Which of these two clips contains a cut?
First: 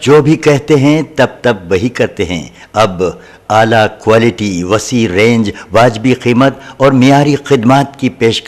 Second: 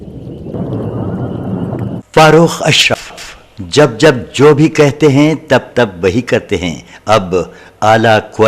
second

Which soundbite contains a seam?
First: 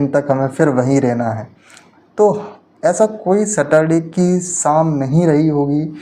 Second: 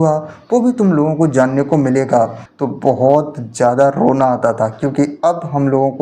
second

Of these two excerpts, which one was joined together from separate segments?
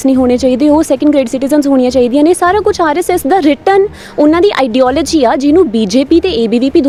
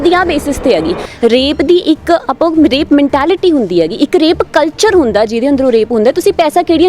second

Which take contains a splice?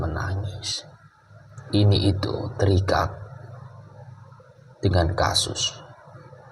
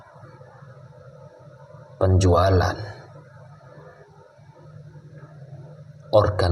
first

